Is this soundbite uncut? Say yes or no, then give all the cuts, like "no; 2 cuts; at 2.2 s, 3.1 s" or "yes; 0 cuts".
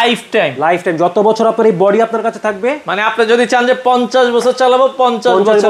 yes; 0 cuts